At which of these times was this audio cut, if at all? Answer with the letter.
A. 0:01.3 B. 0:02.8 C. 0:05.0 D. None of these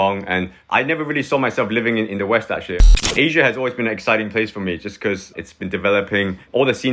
B